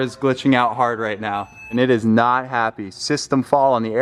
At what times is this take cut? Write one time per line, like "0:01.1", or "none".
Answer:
0:01.7